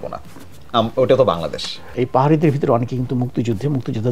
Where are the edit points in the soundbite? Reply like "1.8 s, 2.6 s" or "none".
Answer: 1.8 s